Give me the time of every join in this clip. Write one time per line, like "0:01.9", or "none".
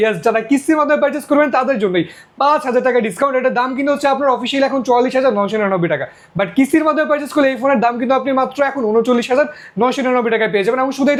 none